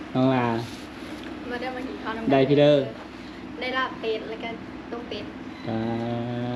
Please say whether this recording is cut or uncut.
uncut